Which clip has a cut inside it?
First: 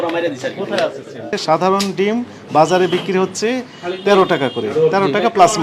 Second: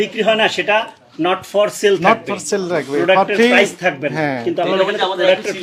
first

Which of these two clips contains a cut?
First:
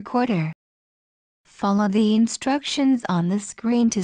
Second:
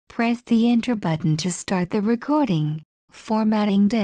first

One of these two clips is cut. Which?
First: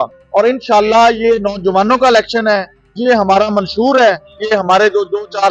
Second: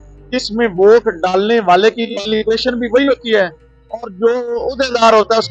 first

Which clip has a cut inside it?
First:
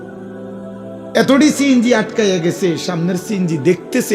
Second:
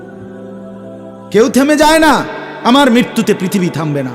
second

